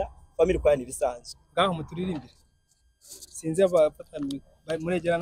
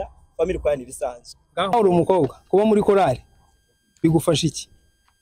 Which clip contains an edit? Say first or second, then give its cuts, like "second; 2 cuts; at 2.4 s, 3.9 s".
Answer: second; 1 cut; at 1.7 s